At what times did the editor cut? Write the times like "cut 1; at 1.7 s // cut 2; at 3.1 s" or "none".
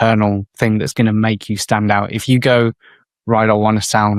none